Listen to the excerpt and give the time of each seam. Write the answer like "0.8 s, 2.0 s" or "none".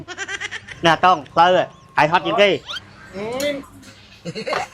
3.7 s